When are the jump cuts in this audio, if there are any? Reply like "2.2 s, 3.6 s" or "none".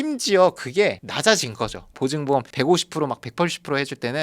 1.8 s